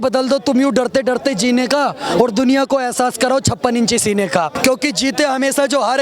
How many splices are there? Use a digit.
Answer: 1